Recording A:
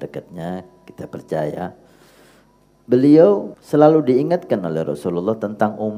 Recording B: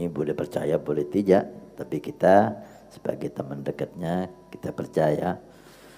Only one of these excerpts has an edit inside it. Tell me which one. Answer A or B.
A